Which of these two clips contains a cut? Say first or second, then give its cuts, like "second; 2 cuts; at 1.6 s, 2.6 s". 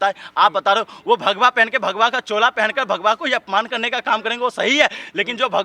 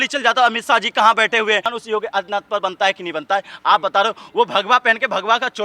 second; 1 cut; at 1.8 s